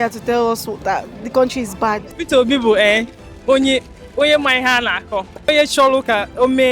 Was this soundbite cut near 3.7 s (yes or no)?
no